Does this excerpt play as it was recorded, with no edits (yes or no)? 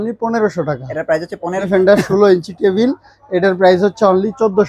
no